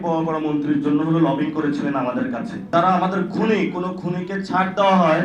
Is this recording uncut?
no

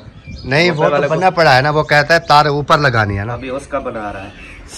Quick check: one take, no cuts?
no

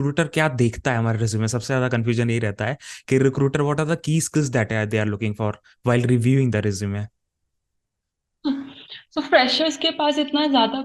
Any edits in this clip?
no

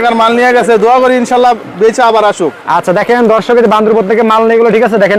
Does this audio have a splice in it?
no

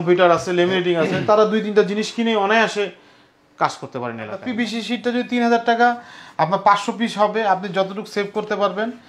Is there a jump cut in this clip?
yes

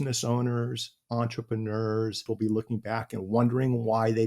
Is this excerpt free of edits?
no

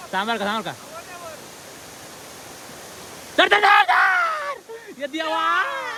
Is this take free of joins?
yes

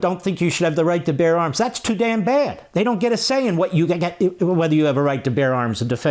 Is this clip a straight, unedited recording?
yes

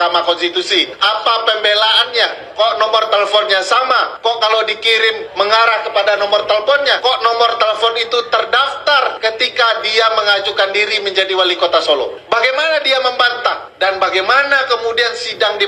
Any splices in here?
yes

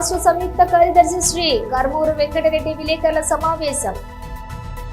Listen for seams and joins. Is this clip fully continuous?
no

